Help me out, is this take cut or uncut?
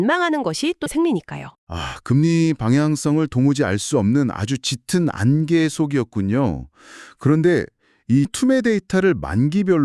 cut